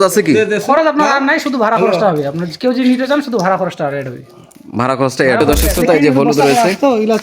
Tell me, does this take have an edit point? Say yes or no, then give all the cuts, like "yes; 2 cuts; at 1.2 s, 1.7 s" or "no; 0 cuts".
yes; 1 cut; at 5.4 s